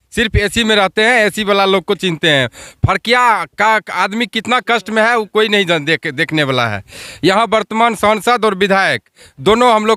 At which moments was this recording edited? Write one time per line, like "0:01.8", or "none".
none